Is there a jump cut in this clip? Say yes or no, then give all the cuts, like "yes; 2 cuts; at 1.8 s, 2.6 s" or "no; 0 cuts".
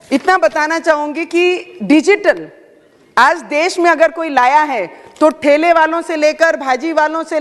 no; 0 cuts